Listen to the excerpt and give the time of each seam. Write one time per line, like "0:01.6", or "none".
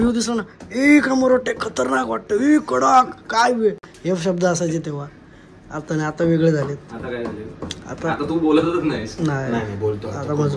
none